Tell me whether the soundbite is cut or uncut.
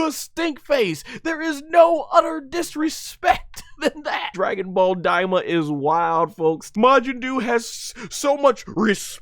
cut